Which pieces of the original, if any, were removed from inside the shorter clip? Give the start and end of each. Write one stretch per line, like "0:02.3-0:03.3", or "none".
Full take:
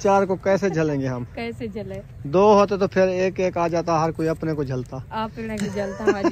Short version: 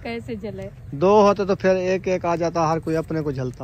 none